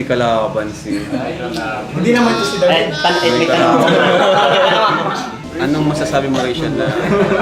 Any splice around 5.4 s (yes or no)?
yes